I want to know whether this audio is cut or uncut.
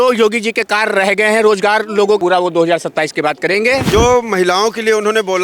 cut